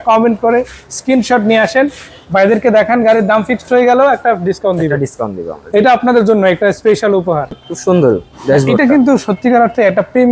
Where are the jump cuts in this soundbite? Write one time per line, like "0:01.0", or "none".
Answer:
0:07.7